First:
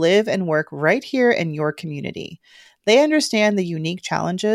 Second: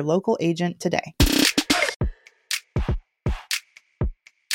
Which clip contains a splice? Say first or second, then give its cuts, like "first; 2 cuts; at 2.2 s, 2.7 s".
second; 1 cut; at 2.0 s